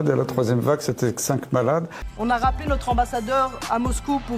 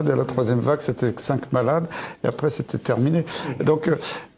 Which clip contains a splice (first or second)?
first